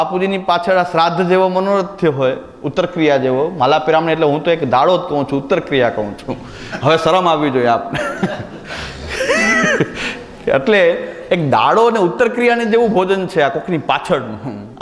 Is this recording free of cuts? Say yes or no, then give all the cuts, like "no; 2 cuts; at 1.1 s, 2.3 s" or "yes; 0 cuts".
yes; 0 cuts